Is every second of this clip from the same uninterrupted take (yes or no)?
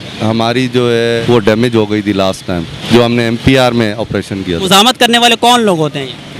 no